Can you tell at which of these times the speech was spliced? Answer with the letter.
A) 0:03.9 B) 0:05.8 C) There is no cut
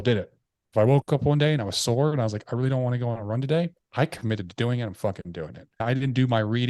B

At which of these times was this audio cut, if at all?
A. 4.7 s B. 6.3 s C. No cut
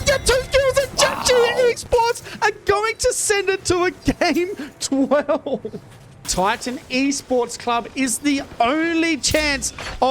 B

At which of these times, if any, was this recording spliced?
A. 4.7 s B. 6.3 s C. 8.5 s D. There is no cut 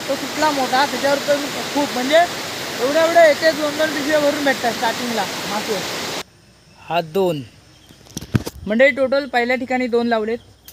B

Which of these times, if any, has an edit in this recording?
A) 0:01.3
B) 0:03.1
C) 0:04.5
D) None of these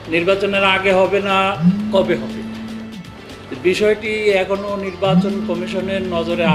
D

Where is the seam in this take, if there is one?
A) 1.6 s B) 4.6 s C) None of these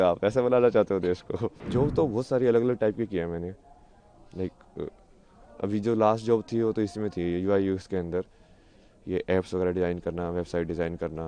A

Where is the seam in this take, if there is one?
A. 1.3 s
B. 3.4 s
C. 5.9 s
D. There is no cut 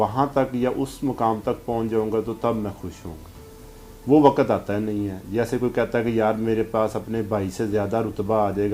D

